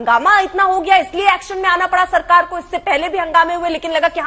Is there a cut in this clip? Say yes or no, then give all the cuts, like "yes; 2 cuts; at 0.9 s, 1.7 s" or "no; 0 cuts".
no; 0 cuts